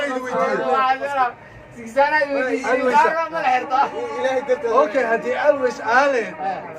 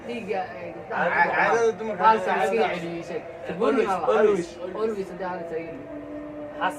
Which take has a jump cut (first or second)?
second